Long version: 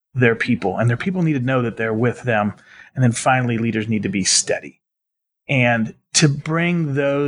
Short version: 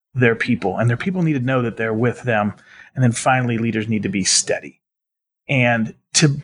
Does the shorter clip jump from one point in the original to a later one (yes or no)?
no